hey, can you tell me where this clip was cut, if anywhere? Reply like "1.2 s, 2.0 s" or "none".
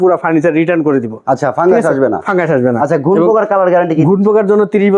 none